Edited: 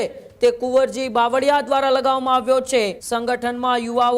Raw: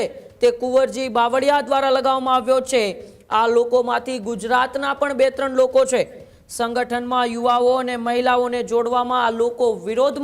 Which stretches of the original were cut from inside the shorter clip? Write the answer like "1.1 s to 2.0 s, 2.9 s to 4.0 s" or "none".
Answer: 3.0 s to 6.5 s